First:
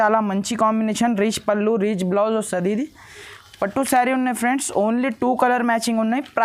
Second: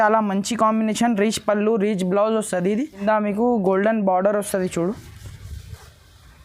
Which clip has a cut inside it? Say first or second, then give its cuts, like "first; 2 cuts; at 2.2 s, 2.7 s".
second; 1 cut; at 3.0 s